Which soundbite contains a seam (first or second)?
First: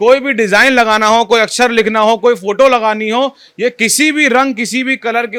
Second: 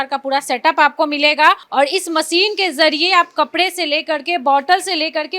second